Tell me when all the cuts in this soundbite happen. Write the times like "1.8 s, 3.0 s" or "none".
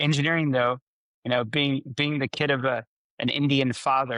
none